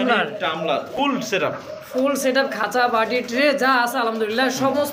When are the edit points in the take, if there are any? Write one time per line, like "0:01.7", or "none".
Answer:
0:00.9